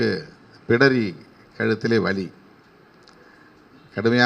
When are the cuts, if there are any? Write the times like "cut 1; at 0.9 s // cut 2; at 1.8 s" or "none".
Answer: none